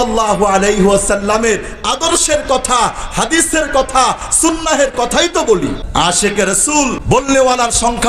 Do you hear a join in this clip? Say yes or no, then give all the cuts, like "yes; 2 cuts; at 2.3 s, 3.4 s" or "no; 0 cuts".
yes; 2 cuts; at 5.8 s, 7.0 s